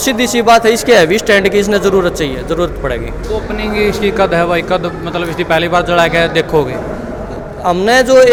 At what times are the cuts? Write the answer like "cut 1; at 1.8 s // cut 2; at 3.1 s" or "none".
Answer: none